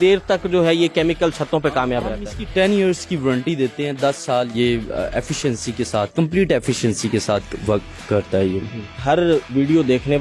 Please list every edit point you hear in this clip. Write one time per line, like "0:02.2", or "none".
none

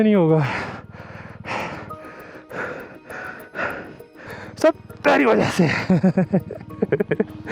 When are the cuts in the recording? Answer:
0:04.2

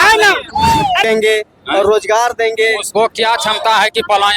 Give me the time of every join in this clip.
0:01.0

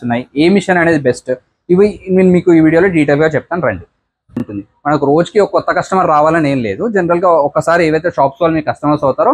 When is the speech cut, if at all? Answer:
0:04.5

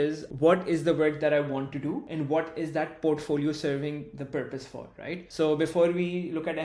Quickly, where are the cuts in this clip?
0:02.1
0:05.3

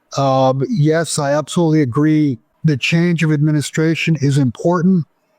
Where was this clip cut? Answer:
0:02.5

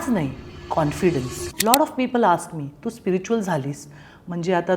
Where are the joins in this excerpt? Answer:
0:01.5

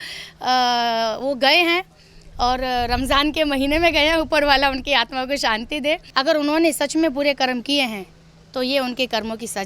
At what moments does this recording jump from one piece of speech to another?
0:06.1

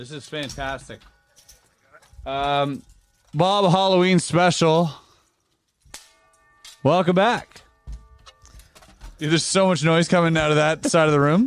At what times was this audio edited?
none

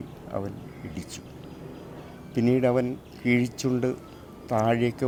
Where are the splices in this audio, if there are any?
none

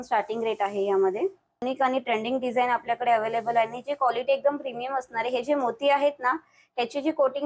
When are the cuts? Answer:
0:01.6

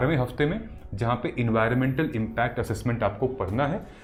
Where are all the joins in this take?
none

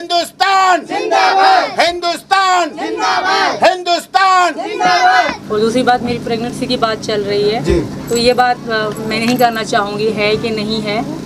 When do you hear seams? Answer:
0:05.4

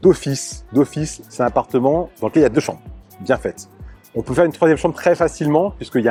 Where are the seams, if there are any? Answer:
none

